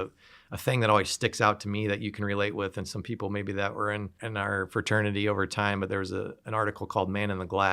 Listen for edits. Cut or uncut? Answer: cut